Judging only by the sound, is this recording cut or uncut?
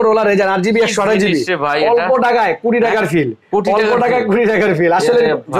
uncut